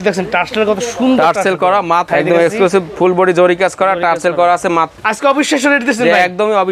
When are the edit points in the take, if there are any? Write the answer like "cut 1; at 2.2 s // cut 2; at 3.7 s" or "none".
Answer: cut 1; at 2.1 s // cut 2; at 4.9 s